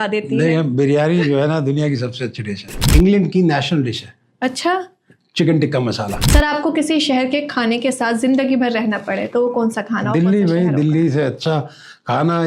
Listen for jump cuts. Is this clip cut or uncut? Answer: cut